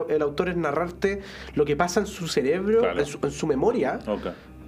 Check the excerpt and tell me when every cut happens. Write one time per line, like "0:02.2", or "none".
none